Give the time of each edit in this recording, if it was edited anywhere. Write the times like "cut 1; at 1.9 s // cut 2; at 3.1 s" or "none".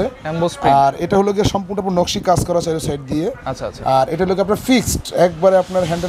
none